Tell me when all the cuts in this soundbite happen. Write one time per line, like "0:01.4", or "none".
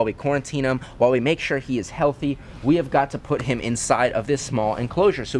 none

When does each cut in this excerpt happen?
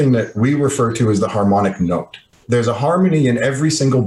0:02.4

